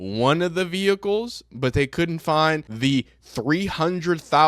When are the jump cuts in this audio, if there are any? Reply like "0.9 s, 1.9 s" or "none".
2.7 s